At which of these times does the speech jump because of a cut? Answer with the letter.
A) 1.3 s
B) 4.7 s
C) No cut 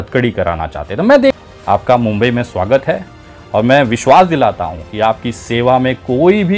A